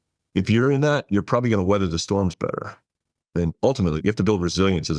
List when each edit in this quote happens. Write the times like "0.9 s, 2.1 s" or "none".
4.0 s